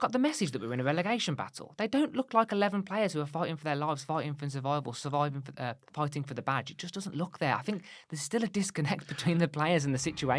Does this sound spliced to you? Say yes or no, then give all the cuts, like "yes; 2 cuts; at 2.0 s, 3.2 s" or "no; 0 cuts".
no; 0 cuts